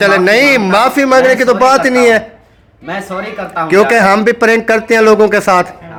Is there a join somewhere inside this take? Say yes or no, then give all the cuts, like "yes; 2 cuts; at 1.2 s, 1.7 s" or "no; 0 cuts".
no; 0 cuts